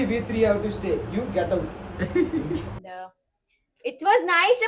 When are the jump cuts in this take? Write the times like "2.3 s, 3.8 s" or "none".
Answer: 2.8 s